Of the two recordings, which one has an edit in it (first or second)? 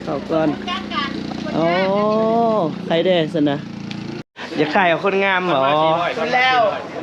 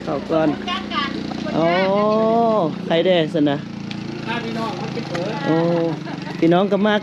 first